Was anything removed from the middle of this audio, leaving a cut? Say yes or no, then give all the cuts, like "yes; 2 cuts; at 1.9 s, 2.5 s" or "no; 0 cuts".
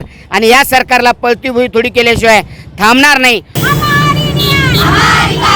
yes; 1 cut; at 3.5 s